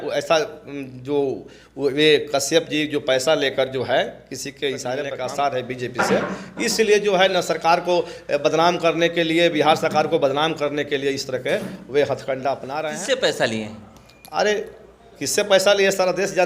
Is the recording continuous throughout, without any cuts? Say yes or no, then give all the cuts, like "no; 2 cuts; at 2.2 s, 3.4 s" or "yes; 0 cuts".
no; 2 cuts; at 5.1 s, 12.8 s